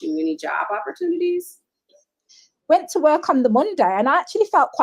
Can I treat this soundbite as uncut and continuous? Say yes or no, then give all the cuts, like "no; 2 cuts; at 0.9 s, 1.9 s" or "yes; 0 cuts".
no; 1 cut; at 2.3 s